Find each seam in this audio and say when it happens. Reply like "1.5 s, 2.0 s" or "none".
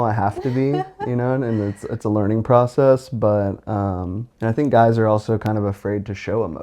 4.2 s